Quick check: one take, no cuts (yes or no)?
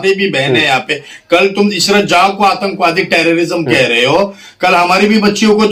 yes